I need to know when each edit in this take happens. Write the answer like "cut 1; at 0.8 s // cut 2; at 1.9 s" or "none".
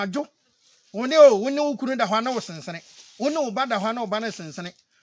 none

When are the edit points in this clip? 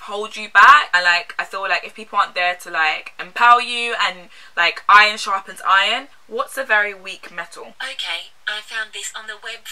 cut 1; at 0.9 s

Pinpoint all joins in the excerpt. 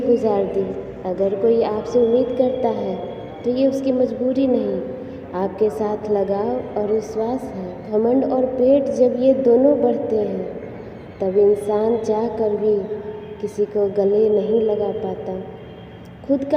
cut 1; at 7.8 s

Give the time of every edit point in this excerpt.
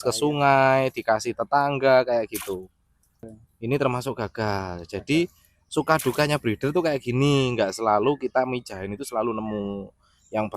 cut 1; at 3.3 s

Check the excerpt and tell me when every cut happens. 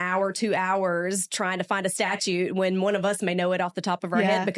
none

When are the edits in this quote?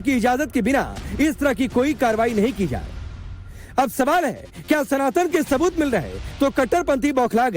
cut 1; at 6.2 s

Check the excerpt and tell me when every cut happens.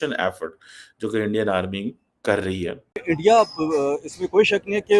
cut 1; at 3.0 s

